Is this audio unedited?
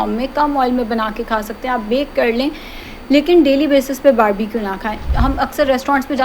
no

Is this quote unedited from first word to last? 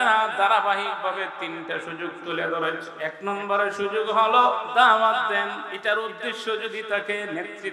no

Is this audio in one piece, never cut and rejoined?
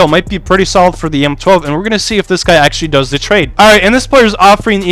no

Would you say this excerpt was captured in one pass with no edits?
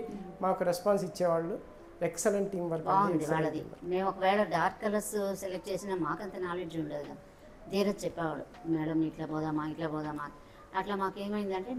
yes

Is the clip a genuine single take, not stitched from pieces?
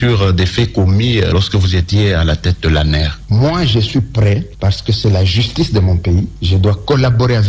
yes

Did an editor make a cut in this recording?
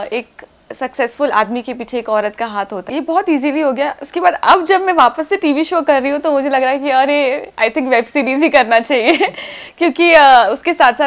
yes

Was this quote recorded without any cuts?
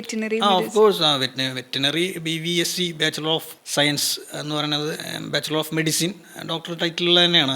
no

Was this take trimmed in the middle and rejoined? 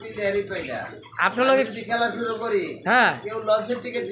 no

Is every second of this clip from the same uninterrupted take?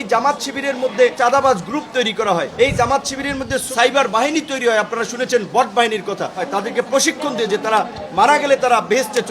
no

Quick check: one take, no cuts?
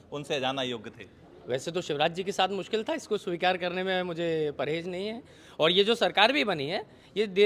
yes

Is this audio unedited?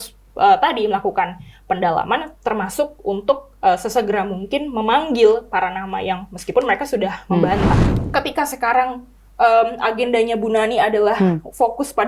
no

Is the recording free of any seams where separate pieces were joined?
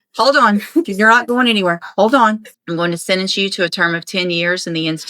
no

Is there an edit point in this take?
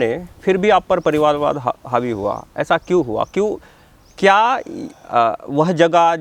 no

